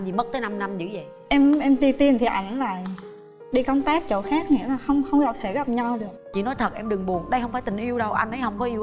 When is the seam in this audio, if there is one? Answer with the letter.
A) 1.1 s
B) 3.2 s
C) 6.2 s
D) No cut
C